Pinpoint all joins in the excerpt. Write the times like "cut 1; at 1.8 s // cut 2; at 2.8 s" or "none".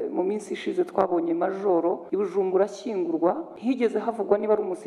cut 1; at 2.0 s // cut 2; at 3.5 s